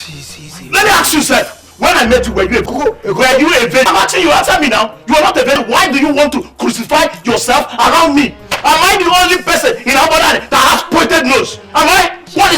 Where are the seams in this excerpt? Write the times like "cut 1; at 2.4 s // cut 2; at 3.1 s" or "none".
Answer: cut 1; at 2.7 s // cut 2; at 3.9 s // cut 3; at 5.6 s

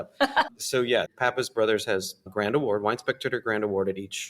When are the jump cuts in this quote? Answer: cut 1; at 1.1 s // cut 2; at 2.3 s

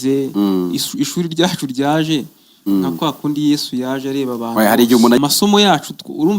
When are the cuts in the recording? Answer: cut 1; at 5.2 s

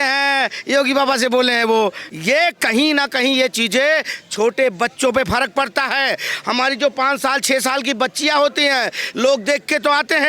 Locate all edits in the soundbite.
cut 1; at 2.0 s

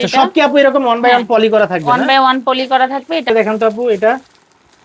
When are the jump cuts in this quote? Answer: none

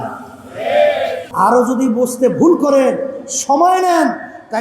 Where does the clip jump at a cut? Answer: cut 1; at 1.2 s

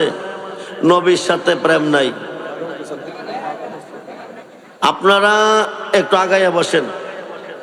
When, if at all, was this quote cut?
none

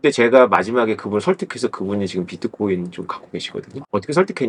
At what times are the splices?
none

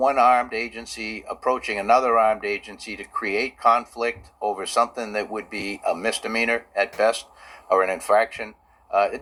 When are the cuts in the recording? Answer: none

